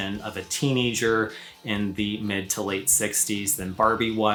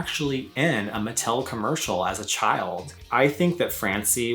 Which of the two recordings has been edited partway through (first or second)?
second